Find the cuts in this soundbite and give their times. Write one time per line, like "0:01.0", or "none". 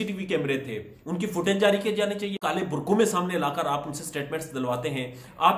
0:02.4